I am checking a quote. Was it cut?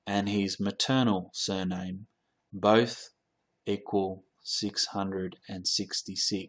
no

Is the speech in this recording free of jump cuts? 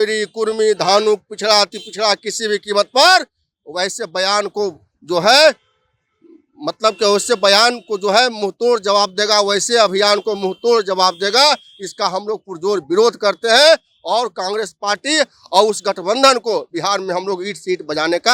yes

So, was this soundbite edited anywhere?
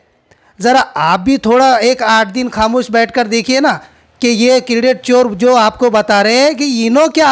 no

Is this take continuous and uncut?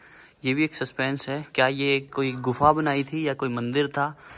yes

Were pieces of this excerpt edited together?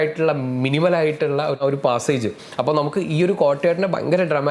yes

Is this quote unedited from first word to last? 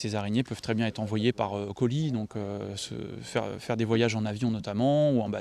no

